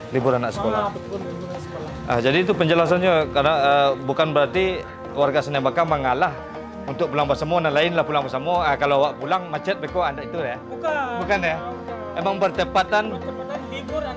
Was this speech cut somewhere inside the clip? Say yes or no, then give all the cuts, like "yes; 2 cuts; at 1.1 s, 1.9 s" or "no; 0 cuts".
no; 0 cuts